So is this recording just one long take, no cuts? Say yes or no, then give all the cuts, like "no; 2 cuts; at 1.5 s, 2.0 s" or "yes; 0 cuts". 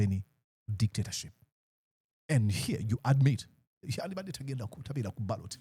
yes; 0 cuts